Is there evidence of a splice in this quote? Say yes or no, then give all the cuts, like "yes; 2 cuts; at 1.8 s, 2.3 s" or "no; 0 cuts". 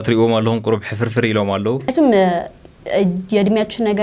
yes; 1 cut; at 1.9 s